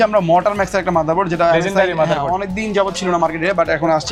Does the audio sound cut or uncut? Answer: uncut